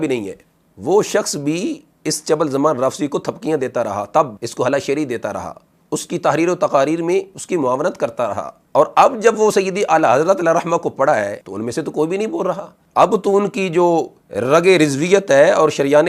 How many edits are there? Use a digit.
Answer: 2